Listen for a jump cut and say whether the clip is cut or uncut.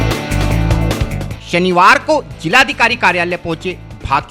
uncut